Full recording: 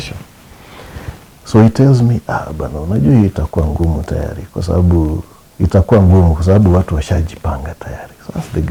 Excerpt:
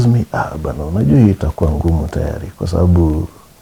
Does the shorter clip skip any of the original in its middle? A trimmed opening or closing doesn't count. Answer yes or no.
no